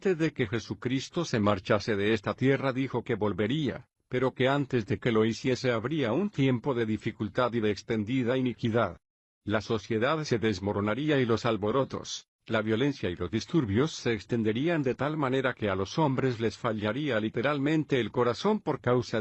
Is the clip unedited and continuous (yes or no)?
no